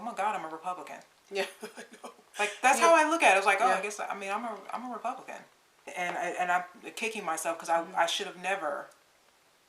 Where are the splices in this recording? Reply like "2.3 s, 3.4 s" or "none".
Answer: 5.6 s